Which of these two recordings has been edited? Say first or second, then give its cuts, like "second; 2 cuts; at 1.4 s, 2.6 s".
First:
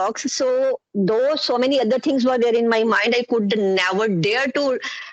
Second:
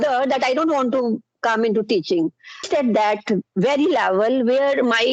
second; 1 cut; at 2.6 s